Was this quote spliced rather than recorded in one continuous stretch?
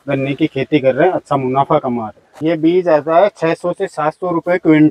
yes; 1 cut; at 2.3 s

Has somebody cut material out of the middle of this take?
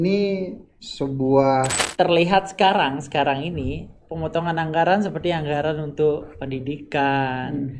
yes; 1 cut; at 1.8 s

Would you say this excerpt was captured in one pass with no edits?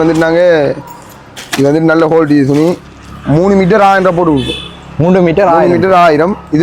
yes; 0 cuts

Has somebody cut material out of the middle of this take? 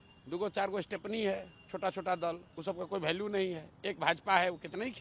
no; 0 cuts

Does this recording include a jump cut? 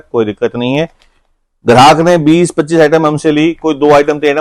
no; 0 cuts

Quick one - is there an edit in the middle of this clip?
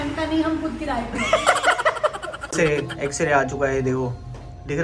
yes; 1 cut; at 2.5 s

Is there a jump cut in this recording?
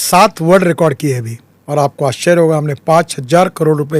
yes; 1 cut; at 1.9 s

